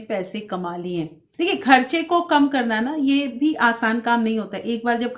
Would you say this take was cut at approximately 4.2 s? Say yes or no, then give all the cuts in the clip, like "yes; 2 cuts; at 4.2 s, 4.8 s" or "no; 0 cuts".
no; 1 cut; at 1.2 s